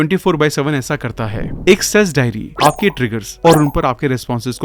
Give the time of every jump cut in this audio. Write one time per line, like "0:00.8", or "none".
0:01.4